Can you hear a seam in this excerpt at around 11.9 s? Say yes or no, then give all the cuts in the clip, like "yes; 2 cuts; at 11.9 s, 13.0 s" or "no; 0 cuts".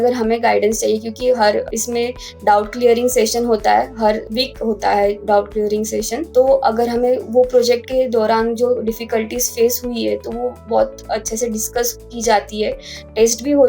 no; 4 cuts; at 1.7 s, 4.3 s, 6.2 s, 10.6 s